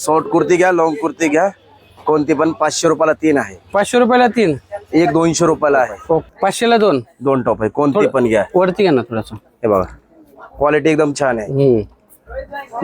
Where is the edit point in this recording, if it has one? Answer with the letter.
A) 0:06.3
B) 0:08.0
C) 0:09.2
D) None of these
A